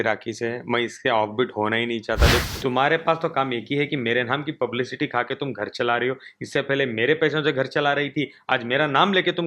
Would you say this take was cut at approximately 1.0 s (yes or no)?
no